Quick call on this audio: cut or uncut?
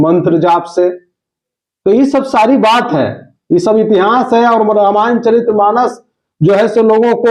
uncut